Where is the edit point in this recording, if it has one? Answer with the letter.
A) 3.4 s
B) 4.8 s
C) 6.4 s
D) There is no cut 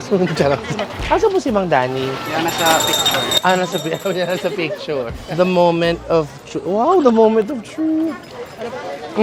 D